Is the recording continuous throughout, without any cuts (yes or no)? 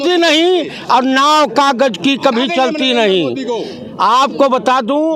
yes